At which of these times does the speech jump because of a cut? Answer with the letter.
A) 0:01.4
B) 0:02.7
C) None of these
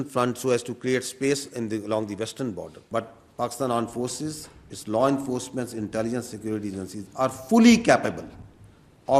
B